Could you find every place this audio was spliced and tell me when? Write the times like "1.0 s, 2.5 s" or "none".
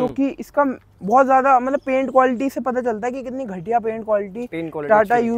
none